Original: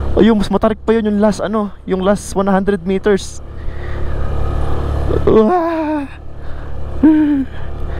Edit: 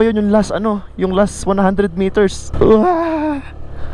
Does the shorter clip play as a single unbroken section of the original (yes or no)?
no